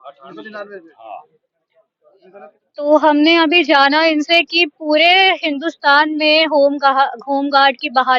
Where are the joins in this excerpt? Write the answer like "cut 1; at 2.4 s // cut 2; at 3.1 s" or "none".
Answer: none